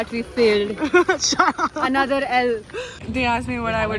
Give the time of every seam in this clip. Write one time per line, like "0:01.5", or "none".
0:03.0